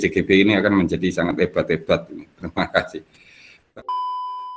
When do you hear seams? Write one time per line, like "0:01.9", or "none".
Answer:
0:03.6